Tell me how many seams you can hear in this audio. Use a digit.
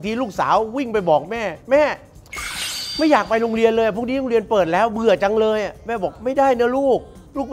0